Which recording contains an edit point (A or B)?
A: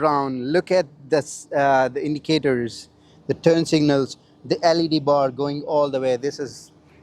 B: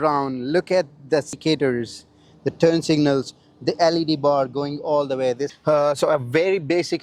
B